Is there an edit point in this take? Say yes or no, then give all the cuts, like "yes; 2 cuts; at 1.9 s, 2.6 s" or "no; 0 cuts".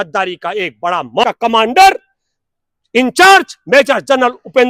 yes; 1 cut; at 1.2 s